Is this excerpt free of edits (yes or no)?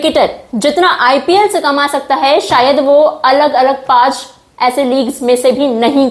yes